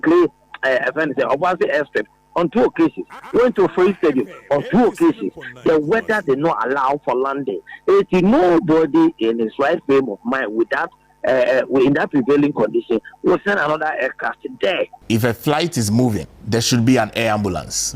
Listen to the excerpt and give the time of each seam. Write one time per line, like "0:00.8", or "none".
0:15.0
0:16.3